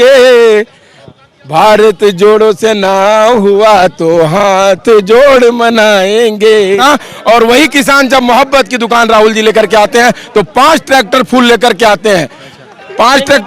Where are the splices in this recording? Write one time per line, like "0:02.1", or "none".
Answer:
0:06.8

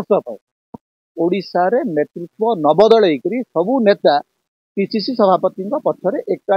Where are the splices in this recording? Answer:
none

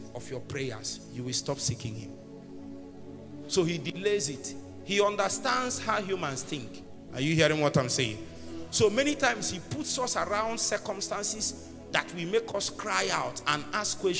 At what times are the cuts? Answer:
none

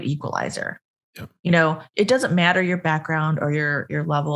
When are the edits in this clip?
0:01.9

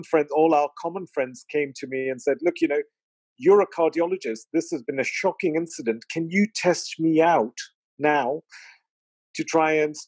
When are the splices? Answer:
none

